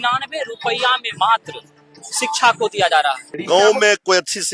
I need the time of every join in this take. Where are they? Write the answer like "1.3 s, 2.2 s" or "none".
3.3 s